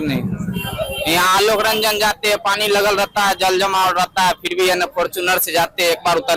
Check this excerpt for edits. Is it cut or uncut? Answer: uncut